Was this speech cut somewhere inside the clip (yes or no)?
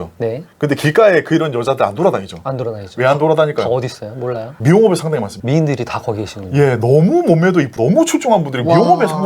no